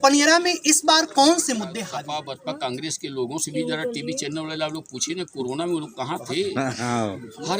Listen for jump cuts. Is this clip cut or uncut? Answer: cut